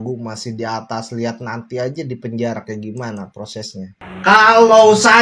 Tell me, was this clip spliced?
yes; 1 cut; at 4.0 s

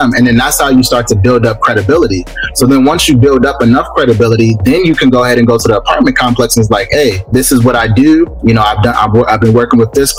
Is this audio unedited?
yes; 0 cuts

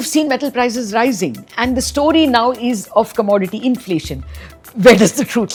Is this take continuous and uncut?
yes; 0 cuts

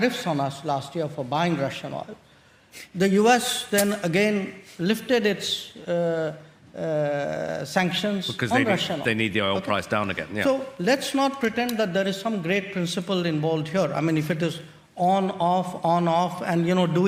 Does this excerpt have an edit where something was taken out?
no; 0 cuts

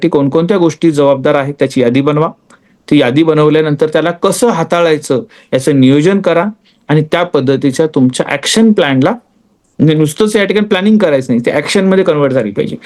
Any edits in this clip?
no; 0 cuts

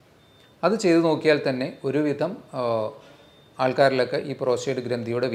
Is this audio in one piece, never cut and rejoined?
yes; 0 cuts

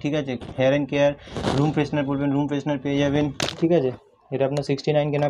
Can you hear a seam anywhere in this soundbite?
no; 0 cuts

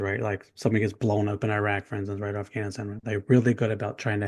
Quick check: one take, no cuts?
yes; 0 cuts

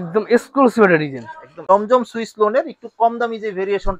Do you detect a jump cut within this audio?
yes; 1 cut; at 1.6 s

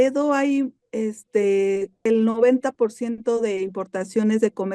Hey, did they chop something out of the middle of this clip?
yes; 1 cut; at 2.1 s

